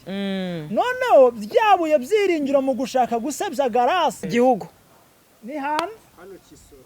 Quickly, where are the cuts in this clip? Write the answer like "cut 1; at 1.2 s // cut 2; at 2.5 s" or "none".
cut 1; at 4.2 s